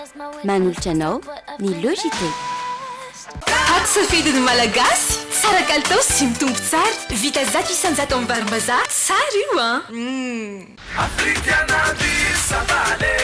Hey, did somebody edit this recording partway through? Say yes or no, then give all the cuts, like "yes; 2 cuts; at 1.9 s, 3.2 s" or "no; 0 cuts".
yes; 2 cuts; at 3.2 s, 10.8 s